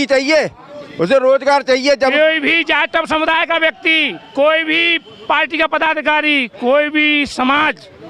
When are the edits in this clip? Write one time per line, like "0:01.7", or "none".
0:02.1